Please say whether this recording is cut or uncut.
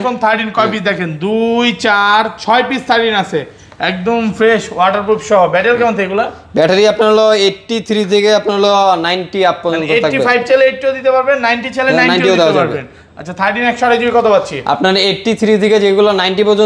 uncut